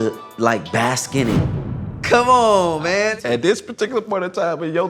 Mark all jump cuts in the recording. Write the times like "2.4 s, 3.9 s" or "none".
1.5 s, 3.1 s